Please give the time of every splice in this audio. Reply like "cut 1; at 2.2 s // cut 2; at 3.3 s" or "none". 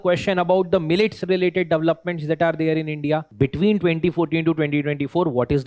cut 1; at 3.3 s